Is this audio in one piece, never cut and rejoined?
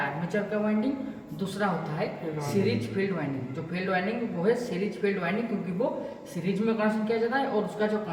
yes; 0 cuts

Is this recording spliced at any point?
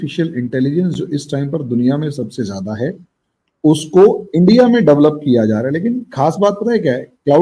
no; 0 cuts

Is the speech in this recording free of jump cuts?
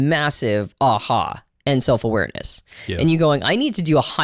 yes; 0 cuts

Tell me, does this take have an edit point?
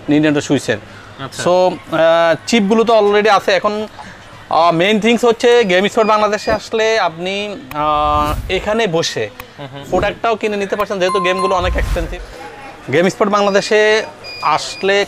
yes; 1 cut; at 12.2 s

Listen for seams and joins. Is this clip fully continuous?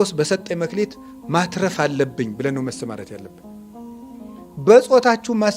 no; 2 cuts; at 3.2 s, 4.5 s

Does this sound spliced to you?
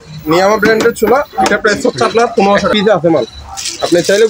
yes; 1 cut; at 2.7 s

